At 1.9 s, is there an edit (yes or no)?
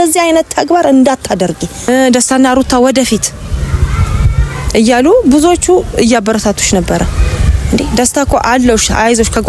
yes